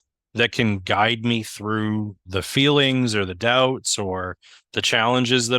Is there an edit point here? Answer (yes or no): yes